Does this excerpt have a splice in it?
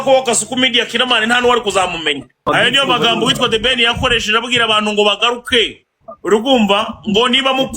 yes; 1 cut; at 2.5 s

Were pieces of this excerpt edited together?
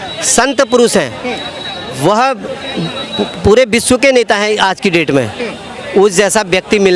no; 0 cuts

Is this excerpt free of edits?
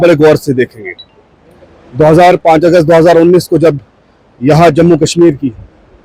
yes; 0 cuts

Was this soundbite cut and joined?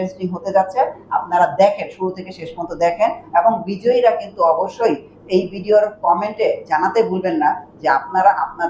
no; 0 cuts

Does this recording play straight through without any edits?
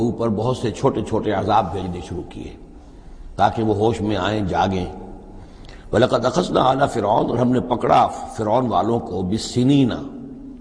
yes; 0 cuts

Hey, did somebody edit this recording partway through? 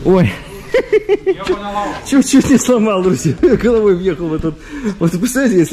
no; 0 cuts

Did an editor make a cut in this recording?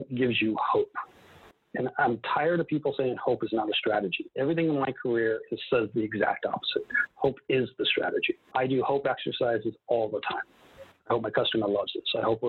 no; 0 cuts

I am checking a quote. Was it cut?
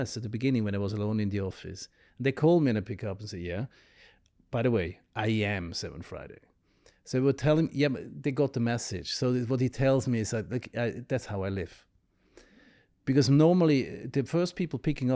no; 0 cuts

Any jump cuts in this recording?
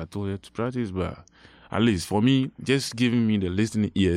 no; 0 cuts

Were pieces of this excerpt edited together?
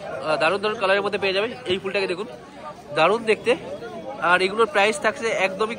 no; 0 cuts

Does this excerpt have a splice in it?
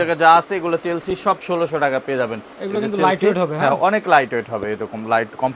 no; 0 cuts

